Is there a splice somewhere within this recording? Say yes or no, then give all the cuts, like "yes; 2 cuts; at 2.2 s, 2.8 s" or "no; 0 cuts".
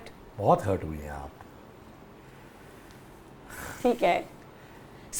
no; 0 cuts